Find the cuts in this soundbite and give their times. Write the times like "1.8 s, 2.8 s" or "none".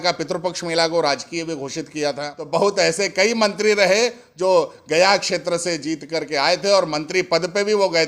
2.3 s